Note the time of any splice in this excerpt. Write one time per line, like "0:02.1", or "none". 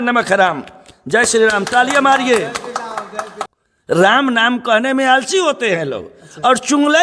0:03.4